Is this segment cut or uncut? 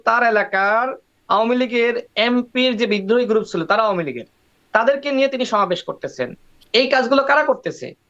uncut